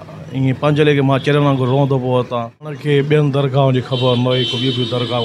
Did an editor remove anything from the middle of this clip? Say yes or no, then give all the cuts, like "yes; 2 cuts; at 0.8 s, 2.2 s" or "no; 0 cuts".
yes; 1 cut; at 2.8 s